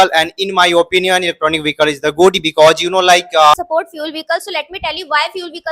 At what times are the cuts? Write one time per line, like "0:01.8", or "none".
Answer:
0:03.5